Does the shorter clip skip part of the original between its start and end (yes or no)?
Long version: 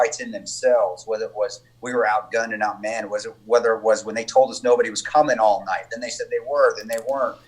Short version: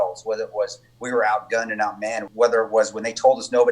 yes